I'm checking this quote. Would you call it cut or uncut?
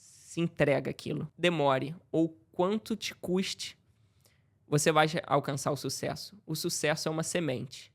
cut